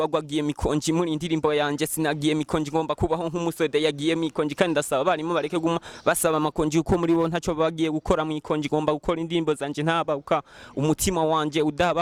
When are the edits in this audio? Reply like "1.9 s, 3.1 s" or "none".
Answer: none